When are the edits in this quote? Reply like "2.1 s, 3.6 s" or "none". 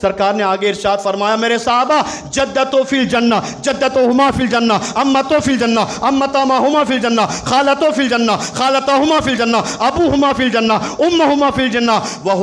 none